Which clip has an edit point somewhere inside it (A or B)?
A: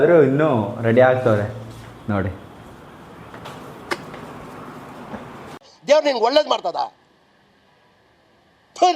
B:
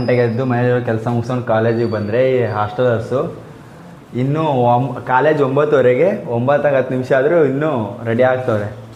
A